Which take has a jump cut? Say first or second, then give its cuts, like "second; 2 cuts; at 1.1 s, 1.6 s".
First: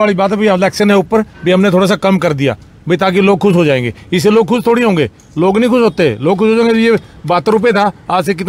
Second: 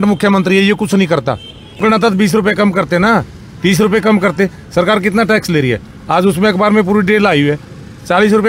second; 1 cut; at 1.8 s